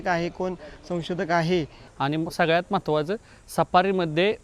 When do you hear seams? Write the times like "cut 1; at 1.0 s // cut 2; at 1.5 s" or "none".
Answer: cut 1; at 1.8 s